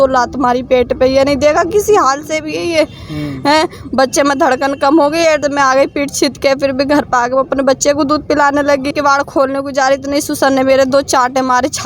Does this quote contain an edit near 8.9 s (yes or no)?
yes